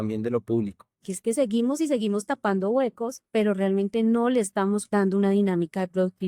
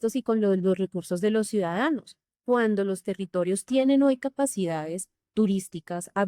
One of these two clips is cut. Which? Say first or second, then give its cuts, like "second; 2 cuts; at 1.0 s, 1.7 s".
first; 3 cuts; at 1.0 s, 3.1 s, 4.8 s